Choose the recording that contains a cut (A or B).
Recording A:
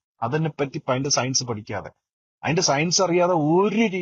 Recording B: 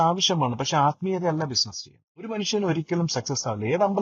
B